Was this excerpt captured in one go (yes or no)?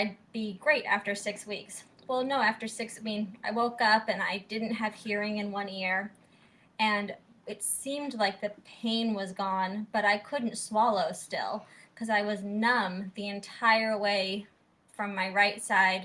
yes